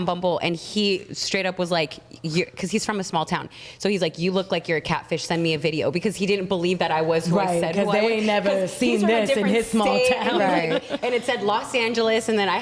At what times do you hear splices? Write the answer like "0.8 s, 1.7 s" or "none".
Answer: none